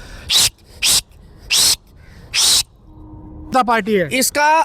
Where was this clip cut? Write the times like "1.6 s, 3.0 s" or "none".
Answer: 3.5 s